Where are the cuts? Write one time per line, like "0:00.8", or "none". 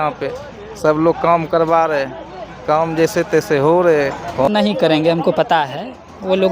0:04.4